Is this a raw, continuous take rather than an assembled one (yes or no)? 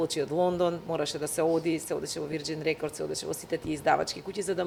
yes